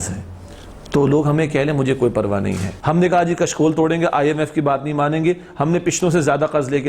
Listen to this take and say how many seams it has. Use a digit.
1